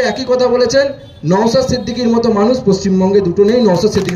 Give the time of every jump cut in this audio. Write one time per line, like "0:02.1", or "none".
none